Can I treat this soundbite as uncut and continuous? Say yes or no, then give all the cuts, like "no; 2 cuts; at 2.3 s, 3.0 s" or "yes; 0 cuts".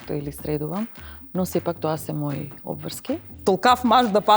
no; 1 cut; at 3.3 s